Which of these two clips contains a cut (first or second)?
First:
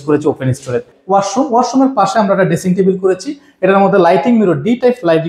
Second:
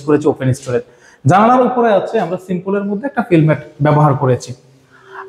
first